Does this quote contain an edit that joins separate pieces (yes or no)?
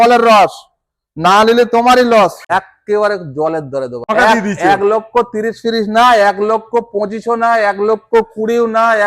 yes